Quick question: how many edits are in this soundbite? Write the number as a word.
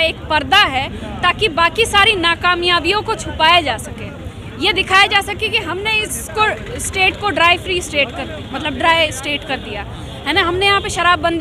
zero